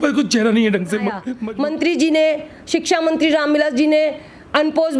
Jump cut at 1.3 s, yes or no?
yes